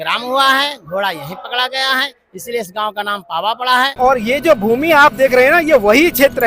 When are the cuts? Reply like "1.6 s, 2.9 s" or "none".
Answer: 3.9 s